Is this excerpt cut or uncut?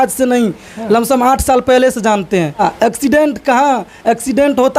cut